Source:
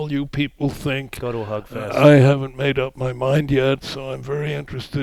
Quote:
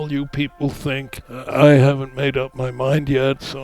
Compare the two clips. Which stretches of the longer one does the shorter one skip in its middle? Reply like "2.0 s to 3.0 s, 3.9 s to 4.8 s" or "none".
1.2 s to 1.6 s